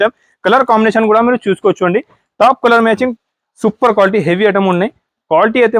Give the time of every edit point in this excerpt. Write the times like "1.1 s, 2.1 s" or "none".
3.1 s